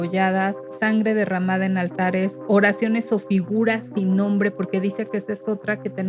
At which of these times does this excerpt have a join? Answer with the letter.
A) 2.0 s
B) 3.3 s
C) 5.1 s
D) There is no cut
D